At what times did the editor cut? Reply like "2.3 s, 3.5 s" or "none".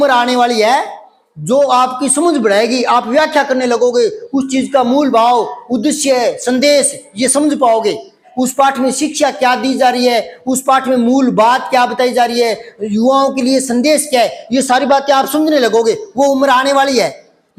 8.2 s